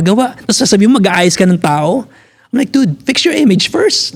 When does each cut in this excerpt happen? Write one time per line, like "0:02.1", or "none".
none